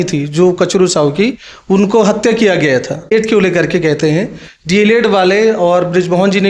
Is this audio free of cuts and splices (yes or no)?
no